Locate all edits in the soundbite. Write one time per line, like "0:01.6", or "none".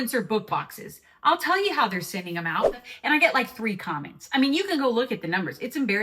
0:02.8